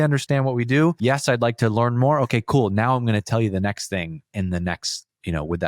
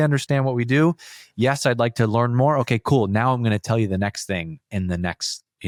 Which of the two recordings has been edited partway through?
first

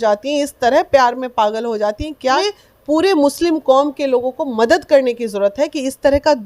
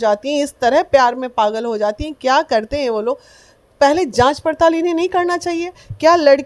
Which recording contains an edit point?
first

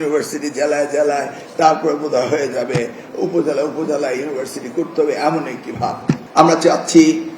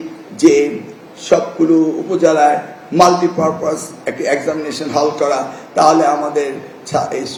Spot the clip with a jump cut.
first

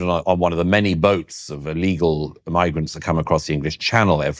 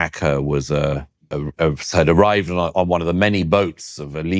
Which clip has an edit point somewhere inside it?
second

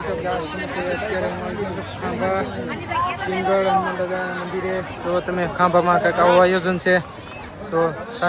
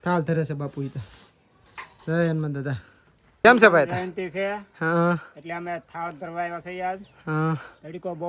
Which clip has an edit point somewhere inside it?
second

